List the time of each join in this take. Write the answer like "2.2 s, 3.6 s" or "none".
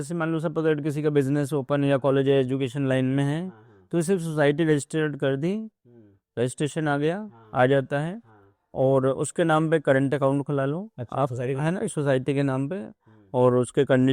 none